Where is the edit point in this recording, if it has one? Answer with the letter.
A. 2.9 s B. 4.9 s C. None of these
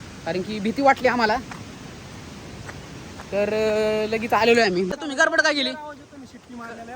B